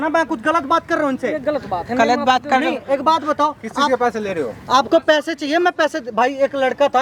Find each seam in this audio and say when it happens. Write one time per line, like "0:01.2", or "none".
none